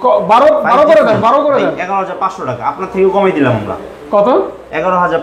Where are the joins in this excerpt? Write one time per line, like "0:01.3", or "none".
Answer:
none